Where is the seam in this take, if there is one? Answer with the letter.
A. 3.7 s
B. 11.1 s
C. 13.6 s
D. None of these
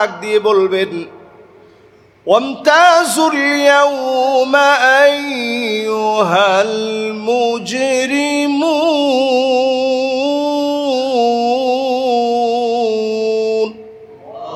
D